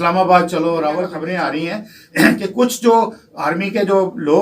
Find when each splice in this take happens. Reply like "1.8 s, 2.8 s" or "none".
1.2 s